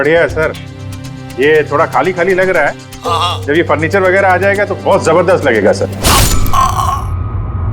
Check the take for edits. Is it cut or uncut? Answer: uncut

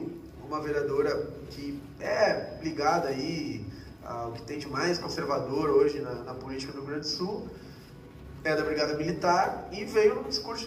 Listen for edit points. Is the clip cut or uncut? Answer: uncut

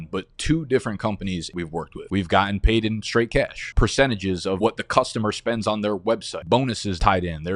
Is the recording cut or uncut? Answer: cut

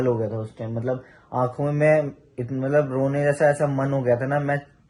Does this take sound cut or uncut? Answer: uncut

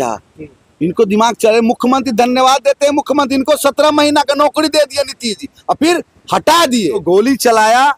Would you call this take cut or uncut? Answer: cut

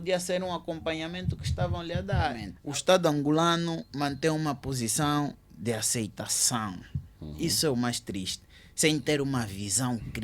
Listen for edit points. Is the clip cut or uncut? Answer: cut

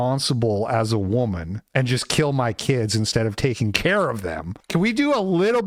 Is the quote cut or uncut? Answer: uncut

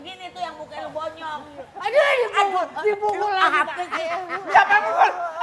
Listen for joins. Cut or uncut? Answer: uncut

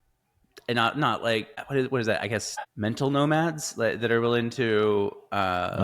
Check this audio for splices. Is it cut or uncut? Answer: cut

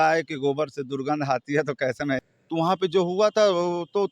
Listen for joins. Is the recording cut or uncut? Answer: cut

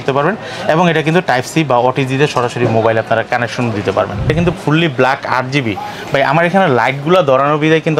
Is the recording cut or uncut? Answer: cut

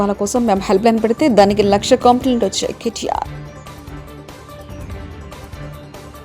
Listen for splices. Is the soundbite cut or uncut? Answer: cut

